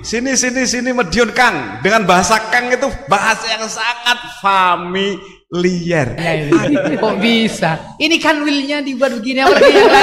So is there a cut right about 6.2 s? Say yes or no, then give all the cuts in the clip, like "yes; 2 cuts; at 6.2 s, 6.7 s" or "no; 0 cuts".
yes; 1 cut; at 6.2 s